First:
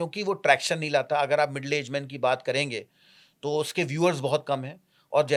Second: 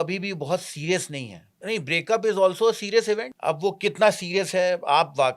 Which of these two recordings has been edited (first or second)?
second